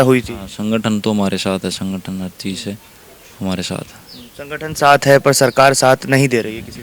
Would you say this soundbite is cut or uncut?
uncut